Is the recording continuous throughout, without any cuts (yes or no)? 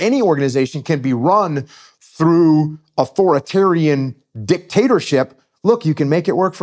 yes